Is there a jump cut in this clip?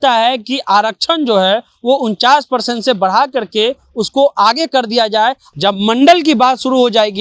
yes; 1 cut; at 5.4 s

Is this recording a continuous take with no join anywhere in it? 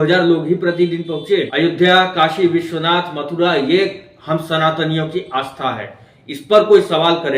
no; 1 cut; at 1.5 s

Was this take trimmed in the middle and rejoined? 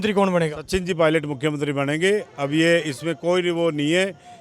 no; 0 cuts

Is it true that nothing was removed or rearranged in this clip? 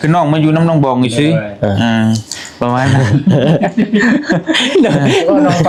yes; 0 cuts

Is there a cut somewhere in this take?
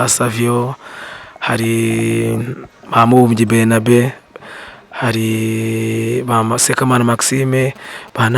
no; 0 cuts

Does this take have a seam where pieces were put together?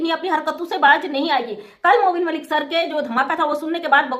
no; 0 cuts

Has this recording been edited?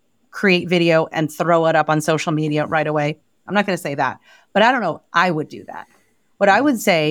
yes; 1 cut; at 3.4 s

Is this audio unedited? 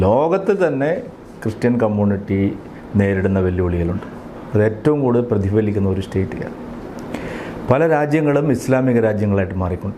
yes; 0 cuts

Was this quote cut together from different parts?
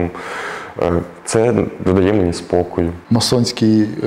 yes; 1 cut; at 3.0 s

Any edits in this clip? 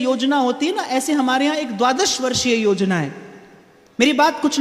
no; 0 cuts

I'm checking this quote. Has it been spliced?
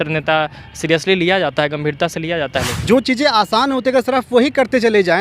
yes; 1 cut; at 2.7 s

